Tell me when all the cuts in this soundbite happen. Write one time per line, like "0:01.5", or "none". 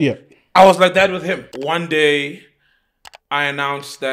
0:01.5

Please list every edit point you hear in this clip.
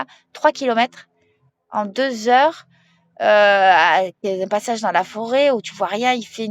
none

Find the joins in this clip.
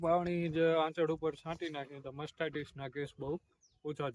none

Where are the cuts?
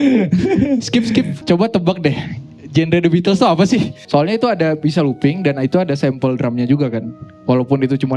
0:01.4
0:04.0

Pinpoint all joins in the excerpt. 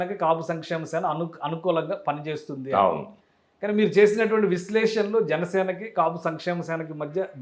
none

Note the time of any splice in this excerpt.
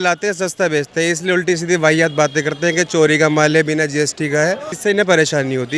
0:04.7

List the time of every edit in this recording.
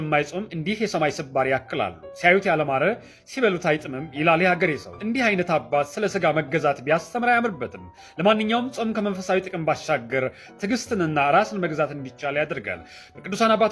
none

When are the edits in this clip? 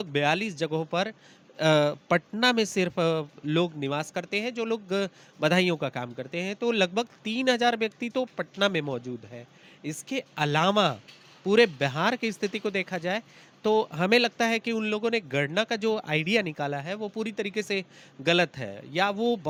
none

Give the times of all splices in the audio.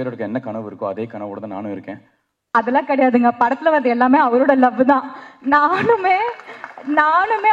0:02.5

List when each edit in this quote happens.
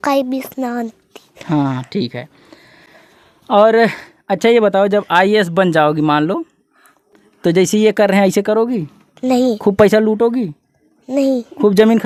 none

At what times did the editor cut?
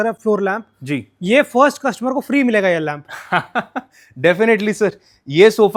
none

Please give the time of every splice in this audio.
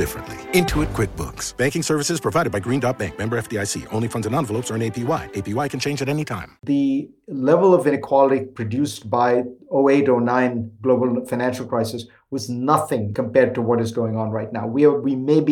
0:06.5
0:08.0
0:13.1

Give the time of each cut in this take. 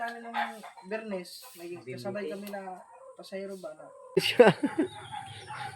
0:04.2

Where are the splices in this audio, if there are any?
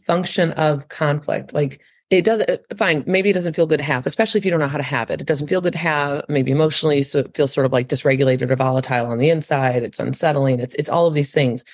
0:01.9

